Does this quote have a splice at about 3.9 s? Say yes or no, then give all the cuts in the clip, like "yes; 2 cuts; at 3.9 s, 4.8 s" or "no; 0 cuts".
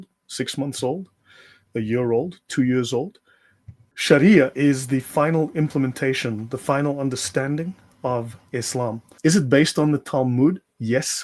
yes; 2 cuts; at 3.9 s, 9.0 s